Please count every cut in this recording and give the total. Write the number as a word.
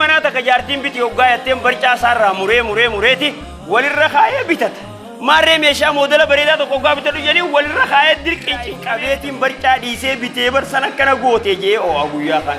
one